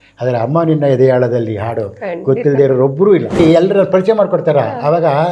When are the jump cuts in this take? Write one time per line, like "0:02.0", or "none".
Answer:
0:03.4

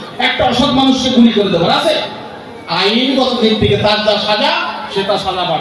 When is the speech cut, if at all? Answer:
none

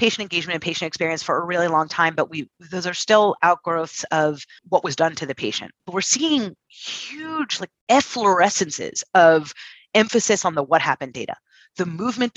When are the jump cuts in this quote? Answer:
0:04.6
0:05.8

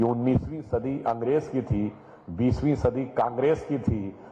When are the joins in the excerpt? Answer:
none

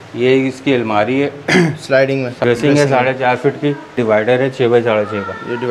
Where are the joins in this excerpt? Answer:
0:02.4
0:04.0

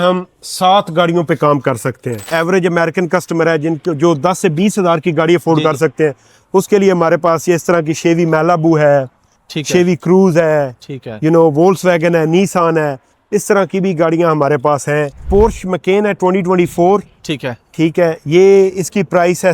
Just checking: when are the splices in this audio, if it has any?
0:02.1
0:15.3

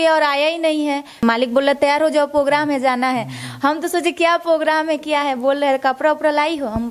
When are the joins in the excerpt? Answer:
0:01.2

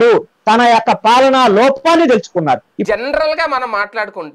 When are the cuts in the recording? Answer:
0:02.7

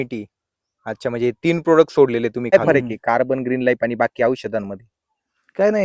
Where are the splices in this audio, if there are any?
0:02.5

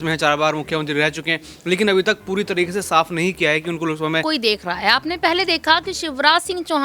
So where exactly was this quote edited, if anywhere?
0:04.2

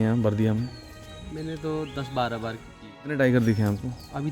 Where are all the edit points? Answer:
0:03.1

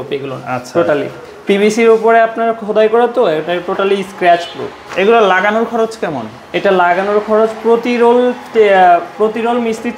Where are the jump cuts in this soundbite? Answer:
none

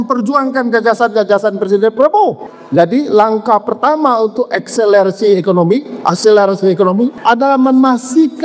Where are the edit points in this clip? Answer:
0:02.5
0:07.2

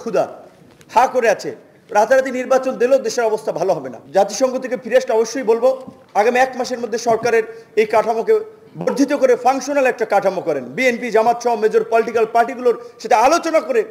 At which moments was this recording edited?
0:03.9

